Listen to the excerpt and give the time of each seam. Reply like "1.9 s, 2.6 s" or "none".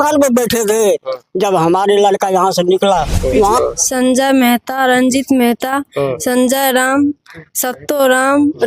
3.6 s